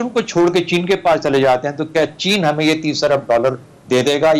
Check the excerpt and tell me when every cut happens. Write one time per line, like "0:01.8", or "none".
none